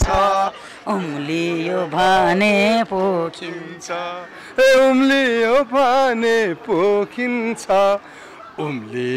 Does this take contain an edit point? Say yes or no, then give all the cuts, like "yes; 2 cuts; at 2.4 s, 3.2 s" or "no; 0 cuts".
no; 0 cuts